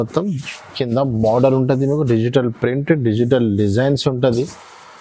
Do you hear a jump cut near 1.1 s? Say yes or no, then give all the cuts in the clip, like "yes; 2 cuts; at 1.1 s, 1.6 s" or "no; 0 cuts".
no; 0 cuts